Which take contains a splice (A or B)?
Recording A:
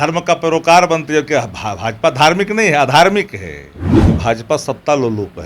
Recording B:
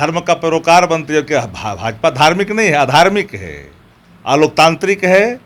A